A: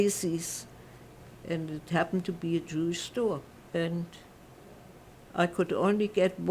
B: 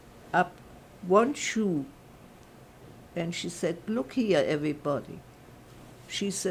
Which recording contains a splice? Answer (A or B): A